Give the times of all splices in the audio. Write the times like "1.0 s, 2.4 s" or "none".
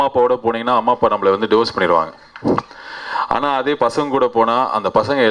none